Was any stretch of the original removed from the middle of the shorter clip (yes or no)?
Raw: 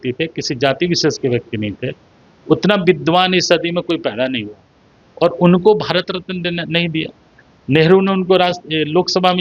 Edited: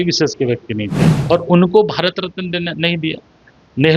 yes